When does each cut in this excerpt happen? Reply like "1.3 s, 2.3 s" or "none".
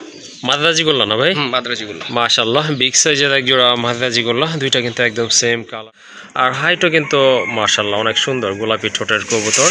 5.8 s